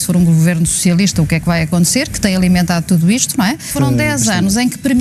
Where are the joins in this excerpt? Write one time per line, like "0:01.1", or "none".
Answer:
0:03.7

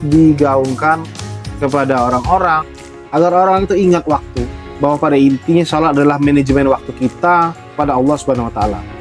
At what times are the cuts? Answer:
none

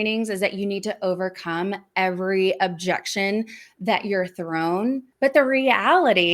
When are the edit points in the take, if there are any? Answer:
0:05.1

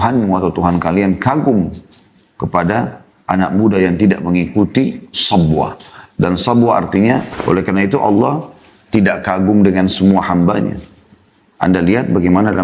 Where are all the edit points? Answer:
0:07.3

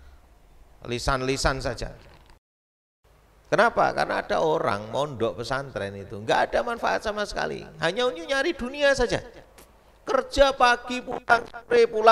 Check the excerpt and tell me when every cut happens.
0:02.9

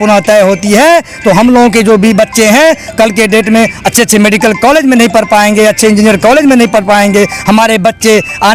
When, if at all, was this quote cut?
none

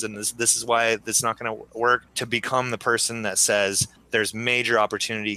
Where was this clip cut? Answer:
0:02.1
0:03.9

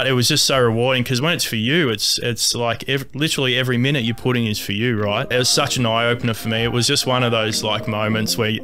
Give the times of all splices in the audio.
0:05.3

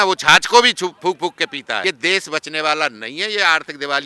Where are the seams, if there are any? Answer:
0:01.8

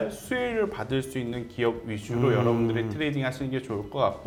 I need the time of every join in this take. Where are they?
none

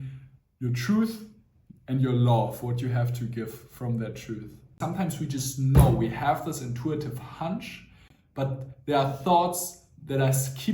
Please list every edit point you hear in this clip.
0:04.8

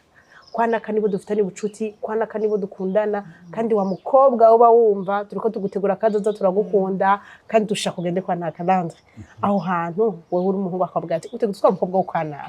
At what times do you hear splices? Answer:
none

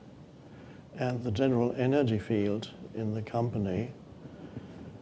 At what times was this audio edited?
0:03.2

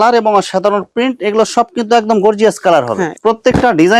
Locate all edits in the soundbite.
0:03.1

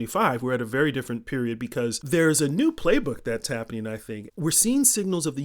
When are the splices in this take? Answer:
0:02.0
0:04.2

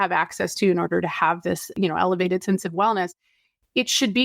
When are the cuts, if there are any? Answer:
0:01.7

